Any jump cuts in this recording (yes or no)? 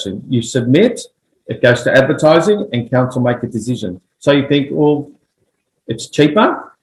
no